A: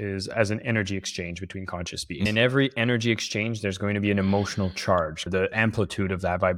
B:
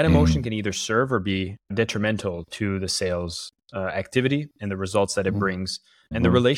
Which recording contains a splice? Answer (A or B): A